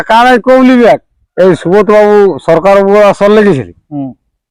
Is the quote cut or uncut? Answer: cut